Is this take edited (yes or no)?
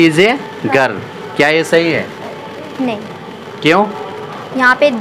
yes